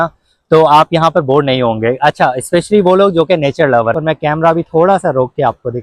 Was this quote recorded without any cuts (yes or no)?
no